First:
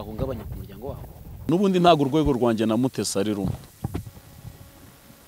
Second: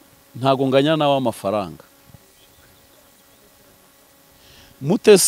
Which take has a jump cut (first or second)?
first